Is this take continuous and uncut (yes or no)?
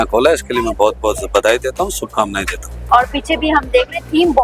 no